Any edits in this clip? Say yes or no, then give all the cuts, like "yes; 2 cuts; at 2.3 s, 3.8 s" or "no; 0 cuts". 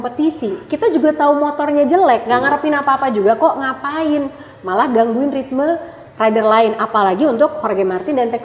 no; 0 cuts